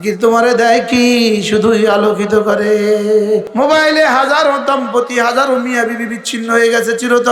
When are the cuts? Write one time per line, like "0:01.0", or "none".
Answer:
0:03.5